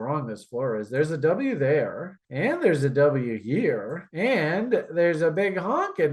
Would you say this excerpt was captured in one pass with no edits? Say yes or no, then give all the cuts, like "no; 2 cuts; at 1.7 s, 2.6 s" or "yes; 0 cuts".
yes; 0 cuts